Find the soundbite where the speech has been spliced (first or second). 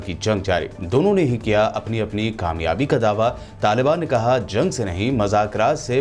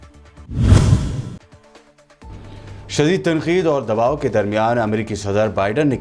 second